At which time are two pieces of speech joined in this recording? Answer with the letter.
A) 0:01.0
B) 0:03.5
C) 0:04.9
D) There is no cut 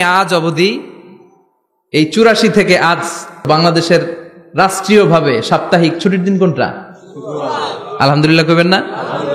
B